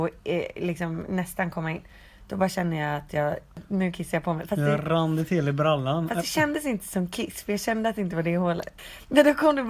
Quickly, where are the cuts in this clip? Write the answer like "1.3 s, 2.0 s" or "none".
3.6 s, 8.7 s